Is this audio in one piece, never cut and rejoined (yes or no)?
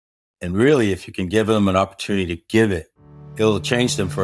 yes